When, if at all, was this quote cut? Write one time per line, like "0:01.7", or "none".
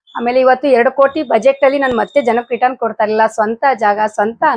none